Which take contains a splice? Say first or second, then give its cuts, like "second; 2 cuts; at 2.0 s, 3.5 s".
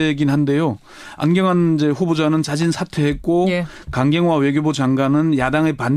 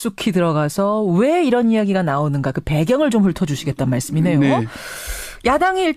second; 1 cut; at 1.3 s